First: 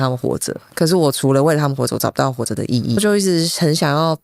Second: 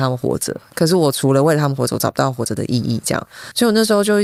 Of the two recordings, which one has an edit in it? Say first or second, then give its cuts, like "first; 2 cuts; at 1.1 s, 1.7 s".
first; 1 cut; at 3.0 s